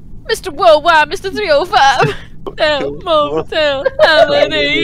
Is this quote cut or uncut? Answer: cut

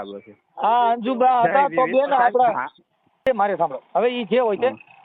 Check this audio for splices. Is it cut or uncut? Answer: cut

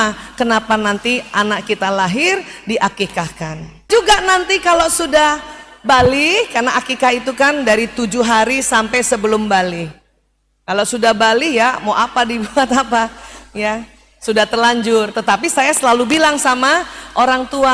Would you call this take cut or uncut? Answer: cut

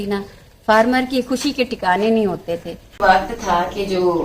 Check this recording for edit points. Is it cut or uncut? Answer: cut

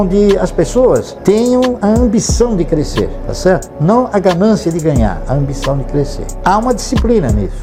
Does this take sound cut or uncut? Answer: uncut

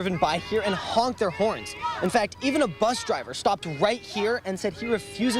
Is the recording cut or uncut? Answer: uncut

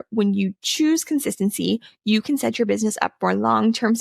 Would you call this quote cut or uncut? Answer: uncut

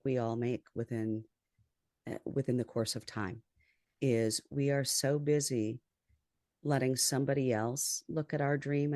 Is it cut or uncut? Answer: uncut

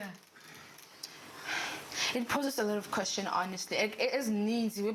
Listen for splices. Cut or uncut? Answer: uncut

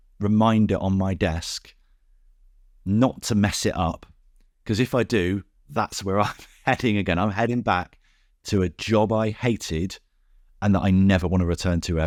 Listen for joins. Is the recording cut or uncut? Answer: uncut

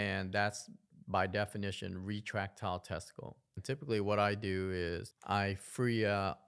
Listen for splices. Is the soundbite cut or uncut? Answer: cut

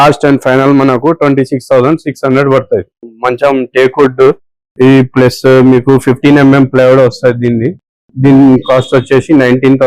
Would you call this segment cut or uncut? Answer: cut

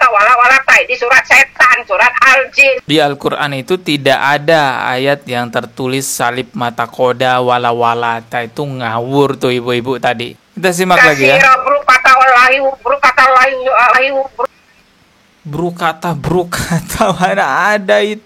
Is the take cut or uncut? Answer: cut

